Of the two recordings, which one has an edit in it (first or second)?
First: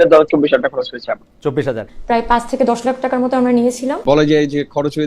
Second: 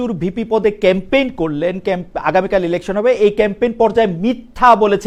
first